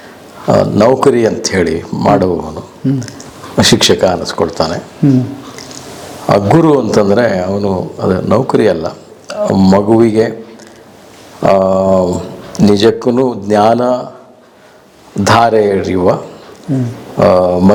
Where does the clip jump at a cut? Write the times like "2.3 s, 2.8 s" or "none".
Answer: none